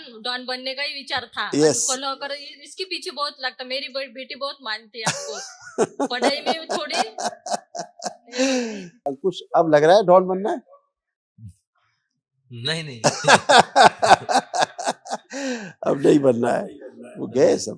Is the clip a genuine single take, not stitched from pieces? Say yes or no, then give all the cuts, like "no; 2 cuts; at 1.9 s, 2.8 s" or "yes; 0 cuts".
no; 1 cut; at 9.1 s